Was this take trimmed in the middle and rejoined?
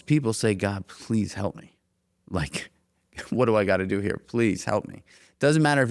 no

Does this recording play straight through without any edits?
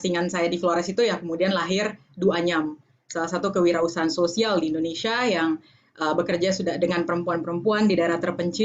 yes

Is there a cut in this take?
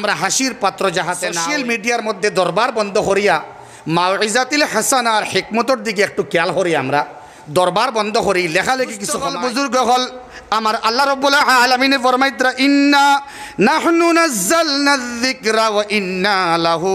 yes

